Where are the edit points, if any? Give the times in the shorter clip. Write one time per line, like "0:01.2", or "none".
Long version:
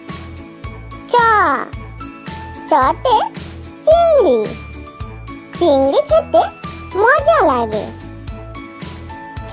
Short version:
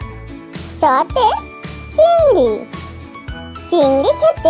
none